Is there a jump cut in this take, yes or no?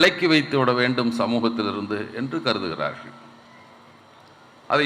no